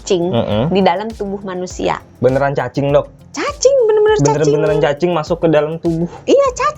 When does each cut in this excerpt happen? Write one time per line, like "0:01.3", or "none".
0:02.1